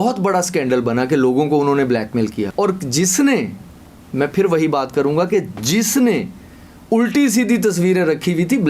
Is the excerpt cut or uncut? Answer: cut